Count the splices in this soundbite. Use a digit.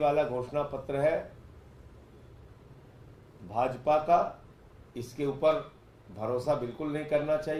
0